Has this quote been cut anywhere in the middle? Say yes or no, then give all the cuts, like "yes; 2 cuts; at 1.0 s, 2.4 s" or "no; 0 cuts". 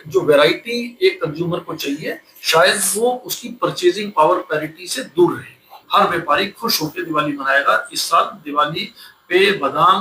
yes; 1 cut; at 5.7 s